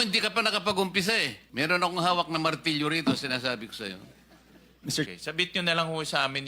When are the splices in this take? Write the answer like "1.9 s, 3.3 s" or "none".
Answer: 1.4 s, 5.1 s